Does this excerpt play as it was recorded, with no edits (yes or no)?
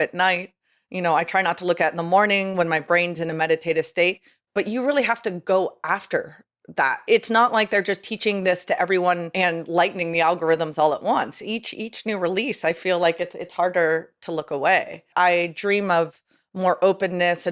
no